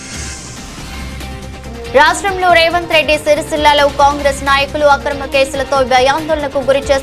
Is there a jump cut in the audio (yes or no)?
yes